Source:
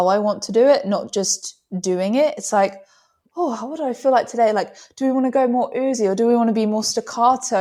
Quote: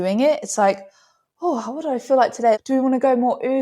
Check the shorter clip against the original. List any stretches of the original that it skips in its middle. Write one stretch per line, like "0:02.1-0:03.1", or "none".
0:04.5-0:04.9

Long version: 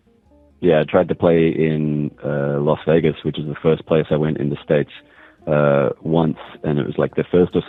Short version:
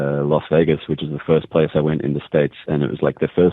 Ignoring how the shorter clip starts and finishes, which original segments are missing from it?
0:05.0-0:06.6

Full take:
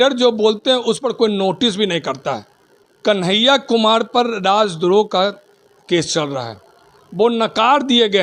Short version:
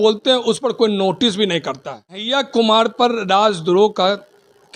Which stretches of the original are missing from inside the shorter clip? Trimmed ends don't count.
0:02.7-0:03.4

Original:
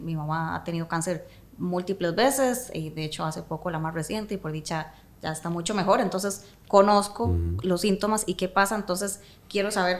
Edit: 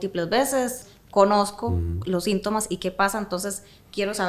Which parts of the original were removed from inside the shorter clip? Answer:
0:02.8-0:06.5

